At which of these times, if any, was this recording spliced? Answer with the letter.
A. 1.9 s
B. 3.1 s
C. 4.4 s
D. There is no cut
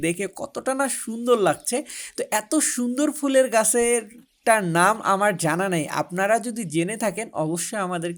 D